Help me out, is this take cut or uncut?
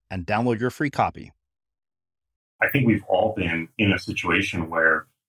cut